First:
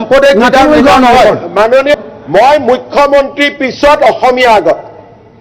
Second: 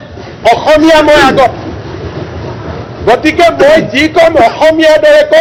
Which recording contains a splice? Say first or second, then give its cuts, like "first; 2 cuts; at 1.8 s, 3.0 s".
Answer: first; 1 cut; at 1.9 s